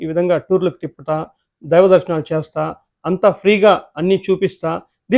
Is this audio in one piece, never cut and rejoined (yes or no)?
yes